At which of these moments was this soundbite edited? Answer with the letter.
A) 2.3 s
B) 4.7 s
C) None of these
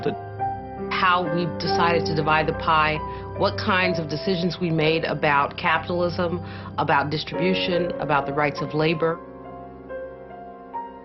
B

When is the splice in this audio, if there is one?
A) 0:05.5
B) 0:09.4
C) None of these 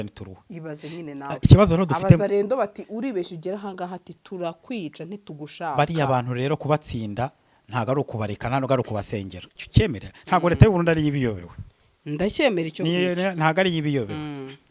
B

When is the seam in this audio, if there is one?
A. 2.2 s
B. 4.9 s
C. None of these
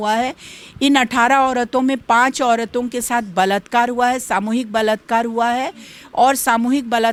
C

